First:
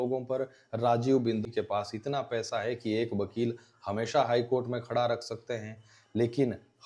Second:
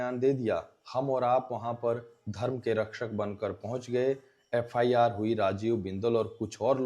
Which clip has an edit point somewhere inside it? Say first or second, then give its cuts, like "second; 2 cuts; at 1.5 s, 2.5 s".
first; 1 cut; at 1.4 s